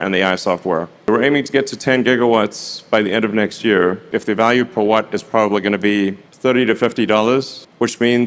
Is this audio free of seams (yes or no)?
no